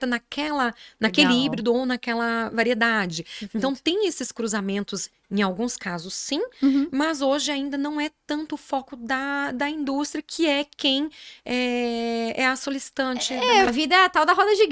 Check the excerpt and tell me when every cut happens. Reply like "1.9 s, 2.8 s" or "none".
13.7 s

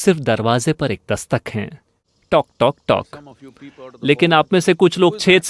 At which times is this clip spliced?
2.1 s

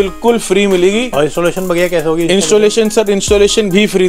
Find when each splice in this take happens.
1.1 s

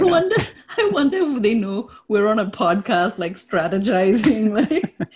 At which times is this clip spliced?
none

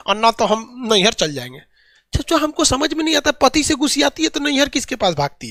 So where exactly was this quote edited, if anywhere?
none

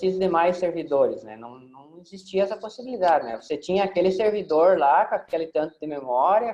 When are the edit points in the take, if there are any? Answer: none

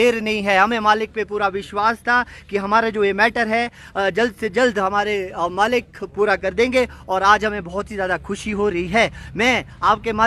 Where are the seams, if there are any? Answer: none

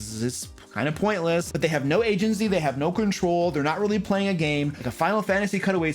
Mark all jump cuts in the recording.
1.5 s, 4.8 s

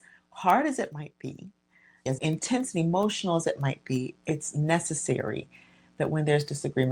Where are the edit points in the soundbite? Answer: 1.9 s

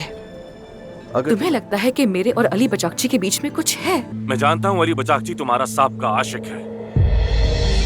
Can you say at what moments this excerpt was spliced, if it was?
1.2 s, 4.1 s

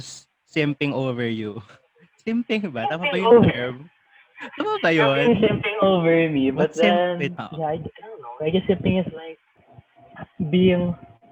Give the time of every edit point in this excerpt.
7.4 s

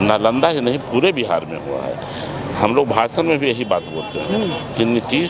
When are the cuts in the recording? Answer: none

